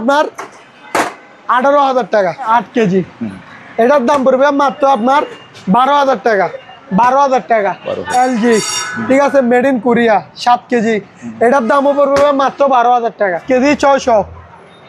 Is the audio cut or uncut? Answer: cut